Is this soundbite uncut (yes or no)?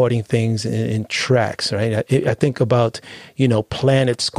yes